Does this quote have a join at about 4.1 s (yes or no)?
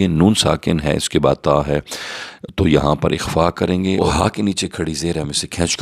yes